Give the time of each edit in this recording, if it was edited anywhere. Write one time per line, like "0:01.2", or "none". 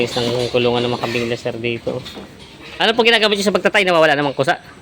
0:02.9